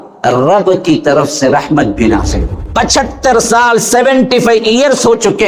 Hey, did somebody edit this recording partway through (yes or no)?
yes